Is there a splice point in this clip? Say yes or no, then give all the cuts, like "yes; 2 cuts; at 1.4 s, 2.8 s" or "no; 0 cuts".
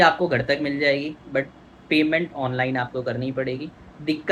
no; 0 cuts